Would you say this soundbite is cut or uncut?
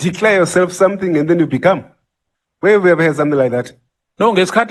uncut